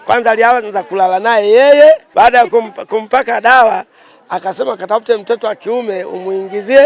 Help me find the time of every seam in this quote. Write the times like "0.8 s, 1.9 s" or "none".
2.1 s